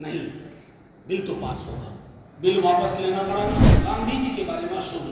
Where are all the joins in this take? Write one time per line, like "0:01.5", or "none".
0:03.8